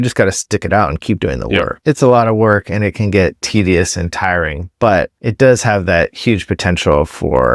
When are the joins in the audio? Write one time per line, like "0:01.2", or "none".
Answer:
0:01.7
0:03.4
0:05.2